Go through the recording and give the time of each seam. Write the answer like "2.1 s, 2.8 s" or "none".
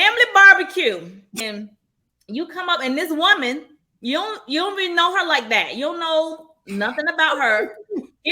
1.4 s